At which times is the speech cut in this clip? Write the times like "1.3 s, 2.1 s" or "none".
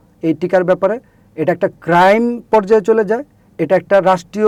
none

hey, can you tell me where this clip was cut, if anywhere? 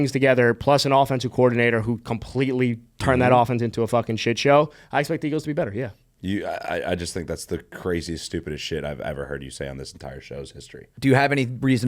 10.9 s

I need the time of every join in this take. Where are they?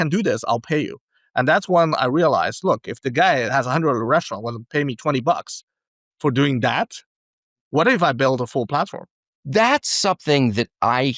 none

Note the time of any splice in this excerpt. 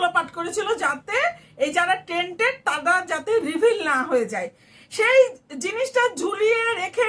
none

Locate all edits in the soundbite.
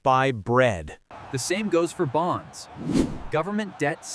0.9 s

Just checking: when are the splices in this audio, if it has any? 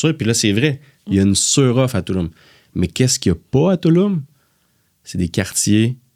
none

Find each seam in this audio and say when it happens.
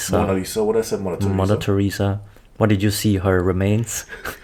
none

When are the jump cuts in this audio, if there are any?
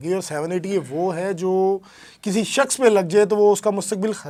none

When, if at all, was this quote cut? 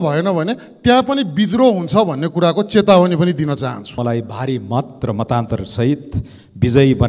4.0 s

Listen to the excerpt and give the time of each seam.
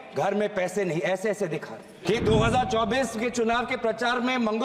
2.0 s

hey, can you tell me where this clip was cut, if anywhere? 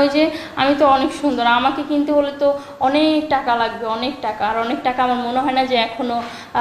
none

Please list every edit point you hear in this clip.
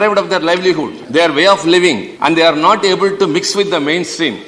0.9 s, 2.1 s

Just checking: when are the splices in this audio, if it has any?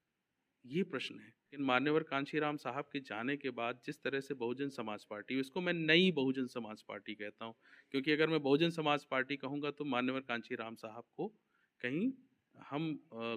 1.6 s

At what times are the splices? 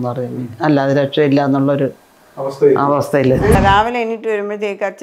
3.5 s

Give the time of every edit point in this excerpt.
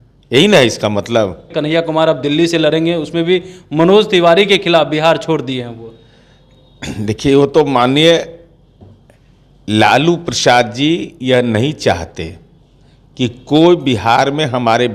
1.5 s

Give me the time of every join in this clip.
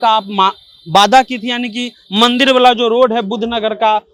none

